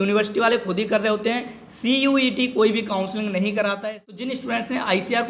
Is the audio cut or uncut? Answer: cut